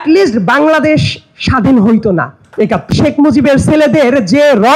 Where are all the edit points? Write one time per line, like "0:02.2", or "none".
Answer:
0:02.9